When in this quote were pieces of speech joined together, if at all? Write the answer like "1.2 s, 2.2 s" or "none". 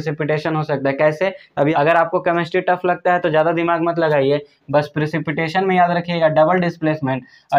1.7 s